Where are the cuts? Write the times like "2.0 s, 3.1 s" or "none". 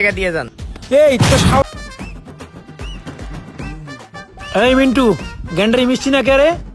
1.6 s